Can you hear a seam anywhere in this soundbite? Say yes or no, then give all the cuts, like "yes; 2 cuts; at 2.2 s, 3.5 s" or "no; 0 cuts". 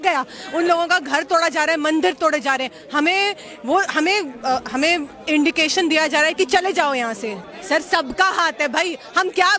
yes; 1 cut; at 7.4 s